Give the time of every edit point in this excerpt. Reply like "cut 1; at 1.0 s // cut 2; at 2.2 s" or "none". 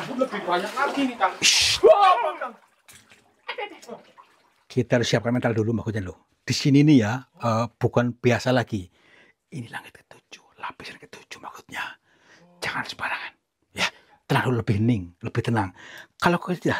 none